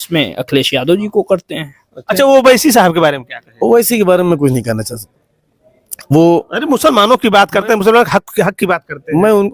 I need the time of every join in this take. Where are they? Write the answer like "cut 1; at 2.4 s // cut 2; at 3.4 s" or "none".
cut 1; at 2.0 s